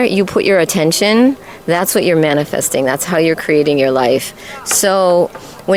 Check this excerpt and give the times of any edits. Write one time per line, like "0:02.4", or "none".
none